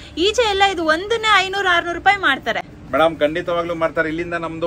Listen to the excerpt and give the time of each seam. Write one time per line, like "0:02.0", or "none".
none

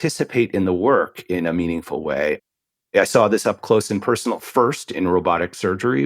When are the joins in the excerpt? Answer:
0:02.4

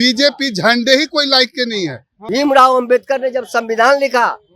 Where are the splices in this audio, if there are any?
0:02.2

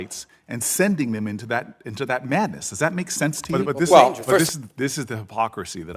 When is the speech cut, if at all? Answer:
0:04.4

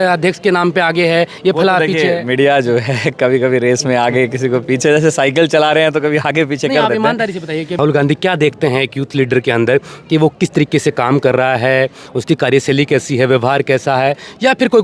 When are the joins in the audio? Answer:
0:07.8

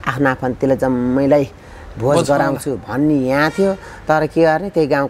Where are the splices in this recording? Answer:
none

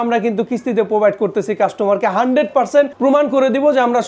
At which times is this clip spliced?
0:02.9

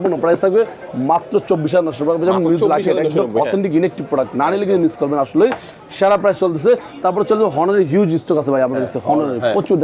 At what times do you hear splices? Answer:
none

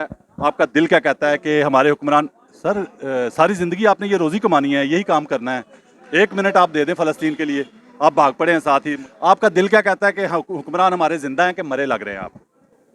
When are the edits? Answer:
none

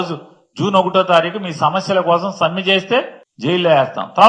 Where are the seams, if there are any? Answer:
0:03.2

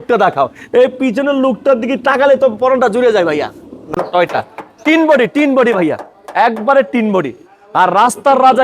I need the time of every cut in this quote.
0:03.9

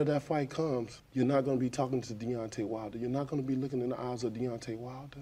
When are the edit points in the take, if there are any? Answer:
0:01.0

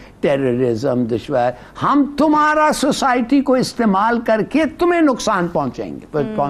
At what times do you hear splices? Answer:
none

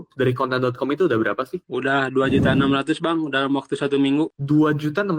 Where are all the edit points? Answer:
none

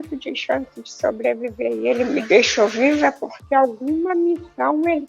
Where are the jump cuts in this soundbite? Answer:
none

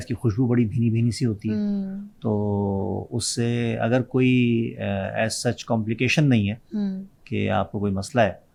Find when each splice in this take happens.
none

